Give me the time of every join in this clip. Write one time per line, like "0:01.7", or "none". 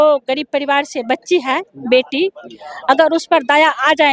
none